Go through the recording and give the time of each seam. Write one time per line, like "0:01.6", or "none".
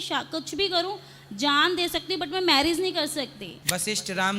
0:03.5